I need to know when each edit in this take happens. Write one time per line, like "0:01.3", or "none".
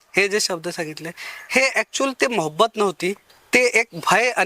0:03.3

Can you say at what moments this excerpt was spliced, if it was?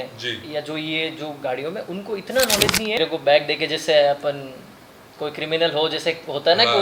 0:03.0

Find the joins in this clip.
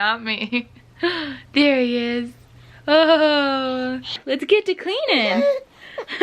0:04.1

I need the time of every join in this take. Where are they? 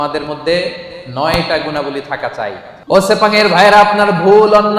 0:02.7

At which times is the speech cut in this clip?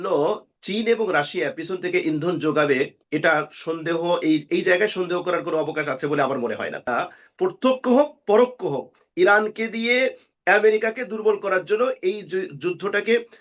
0:06.9

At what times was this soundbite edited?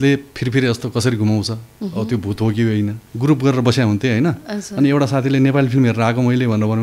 0:03.0

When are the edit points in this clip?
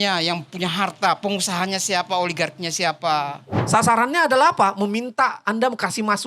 0:03.5

